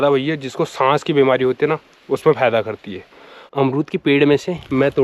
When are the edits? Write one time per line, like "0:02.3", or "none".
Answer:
0:03.5